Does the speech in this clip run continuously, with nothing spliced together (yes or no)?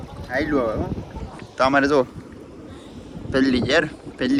yes